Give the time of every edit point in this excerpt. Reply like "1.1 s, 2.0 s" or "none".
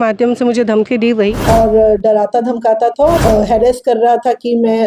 1.4 s, 3.2 s